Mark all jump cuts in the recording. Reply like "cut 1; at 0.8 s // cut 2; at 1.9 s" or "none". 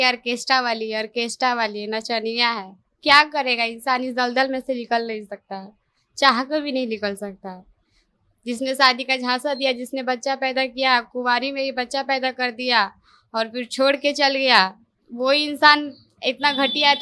none

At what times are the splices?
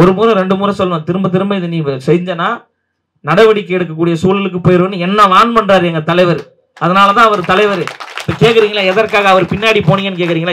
none

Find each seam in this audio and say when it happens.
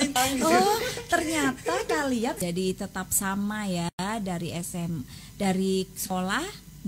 cut 1; at 2.4 s

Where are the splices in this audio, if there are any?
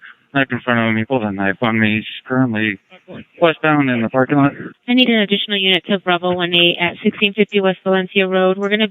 cut 1; at 2.1 s

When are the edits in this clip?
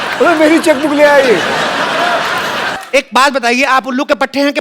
cut 1; at 2.7 s

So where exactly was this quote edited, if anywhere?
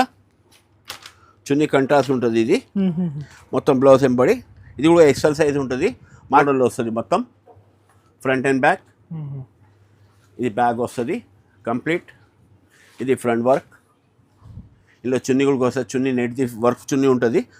cut 1; at 6.4 s

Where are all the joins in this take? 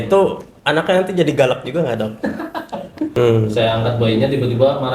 cut 1; at 3.2 s

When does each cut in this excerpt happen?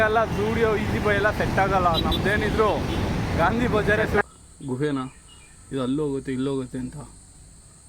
cut 1; at 4.2 s

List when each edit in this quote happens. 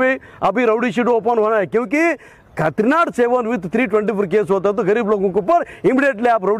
none

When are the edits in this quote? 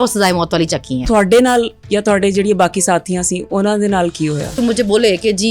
cut 1; at 1.0 s // cut 2; at 4.6 s

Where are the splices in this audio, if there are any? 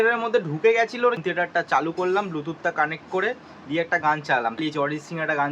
cut 1; at 1.0 s // cut 2; at 4.6 s

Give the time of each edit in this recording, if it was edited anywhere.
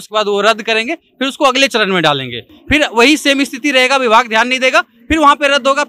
none

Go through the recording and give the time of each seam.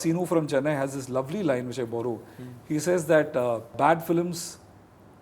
cut 1; at 3.7 s

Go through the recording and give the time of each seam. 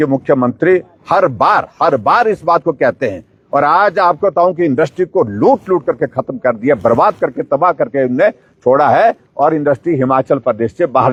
none

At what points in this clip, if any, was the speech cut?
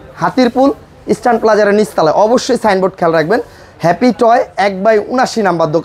none

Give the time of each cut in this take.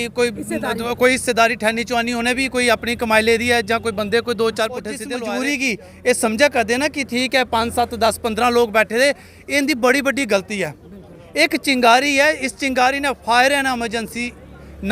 cut 1; at 5.0 s

